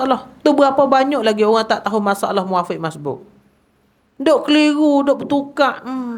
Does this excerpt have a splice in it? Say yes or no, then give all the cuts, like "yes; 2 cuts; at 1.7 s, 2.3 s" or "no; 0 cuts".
no; 0 cuts